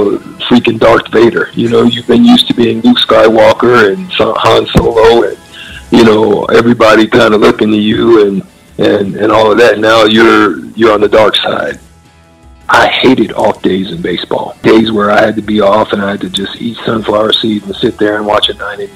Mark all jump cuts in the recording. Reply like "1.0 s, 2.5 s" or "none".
11.9 s, 14.5 s